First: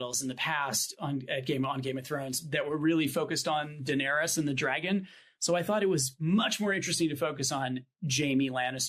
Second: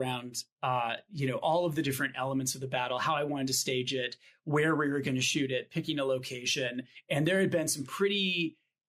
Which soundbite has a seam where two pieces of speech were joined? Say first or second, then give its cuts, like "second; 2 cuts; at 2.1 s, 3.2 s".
second; 1 cut; at 6.9 s